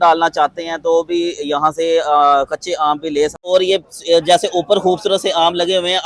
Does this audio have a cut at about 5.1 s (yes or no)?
no